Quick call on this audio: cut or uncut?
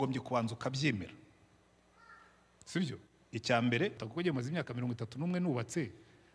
cut